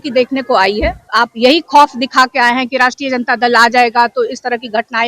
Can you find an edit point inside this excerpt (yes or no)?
yes